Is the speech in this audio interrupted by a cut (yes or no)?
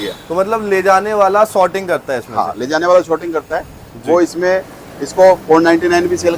no